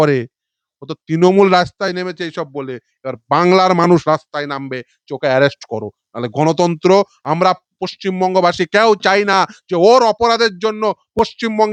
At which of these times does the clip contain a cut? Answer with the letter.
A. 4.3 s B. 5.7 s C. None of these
C